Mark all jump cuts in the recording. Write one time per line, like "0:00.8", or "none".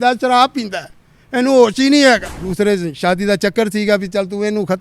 0:02.4